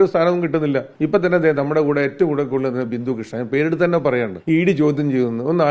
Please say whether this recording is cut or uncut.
cut